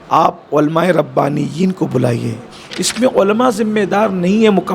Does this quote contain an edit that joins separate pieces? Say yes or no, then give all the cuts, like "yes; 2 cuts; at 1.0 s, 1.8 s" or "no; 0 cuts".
yes; 1 cut; at 2.8 s